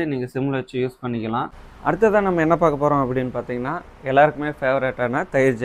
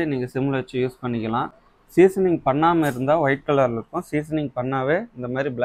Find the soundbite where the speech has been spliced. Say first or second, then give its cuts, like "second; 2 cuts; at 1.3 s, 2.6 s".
first; 1 cut; at 1.6 s